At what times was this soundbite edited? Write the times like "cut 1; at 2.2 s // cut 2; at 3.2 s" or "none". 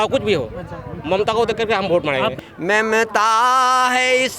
cut 1; at 2.4 s